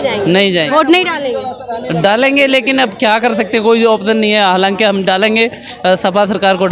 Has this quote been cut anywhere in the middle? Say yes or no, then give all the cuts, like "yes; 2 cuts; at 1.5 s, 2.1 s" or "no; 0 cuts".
no; 0 cuts